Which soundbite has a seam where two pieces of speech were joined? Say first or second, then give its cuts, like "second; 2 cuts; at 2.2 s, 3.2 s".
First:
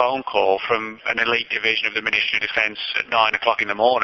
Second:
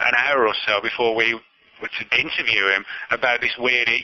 second; 1 cut; at 2.0 s